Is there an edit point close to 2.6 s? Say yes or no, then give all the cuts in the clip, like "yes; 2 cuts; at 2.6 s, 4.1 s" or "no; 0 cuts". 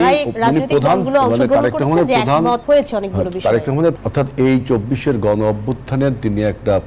yes; 2 cuts; at 2.6 s, 4.0 s